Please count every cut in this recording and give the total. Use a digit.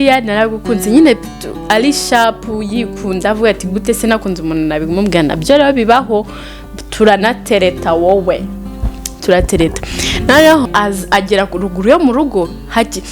1